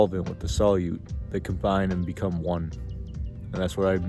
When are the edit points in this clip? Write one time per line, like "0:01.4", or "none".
0:01.1